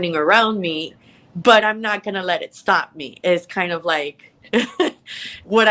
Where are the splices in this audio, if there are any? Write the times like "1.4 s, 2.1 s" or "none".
none